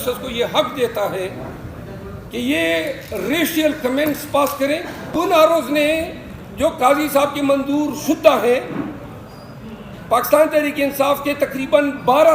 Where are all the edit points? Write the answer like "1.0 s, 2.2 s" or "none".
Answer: 5.1 s

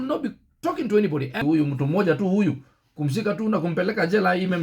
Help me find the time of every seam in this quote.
1.4 s

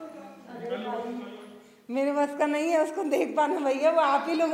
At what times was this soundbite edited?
none

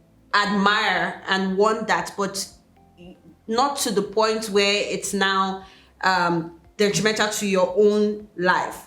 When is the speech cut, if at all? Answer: none

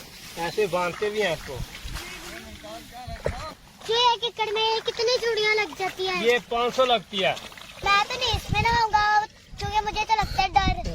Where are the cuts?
3.8 s, 7.8 s

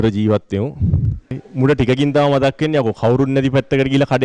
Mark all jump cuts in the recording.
1.4 s

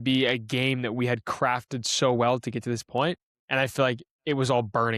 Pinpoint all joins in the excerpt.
none

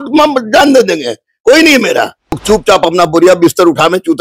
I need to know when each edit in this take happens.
2.3 s

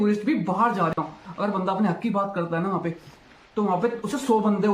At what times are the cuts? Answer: 0.9 s

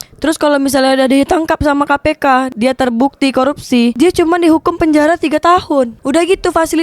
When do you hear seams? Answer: 2.5 s, 3.9 s, 6.0 s

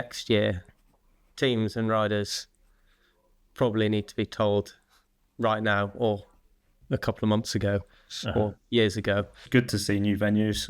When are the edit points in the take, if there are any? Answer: 9.4 s

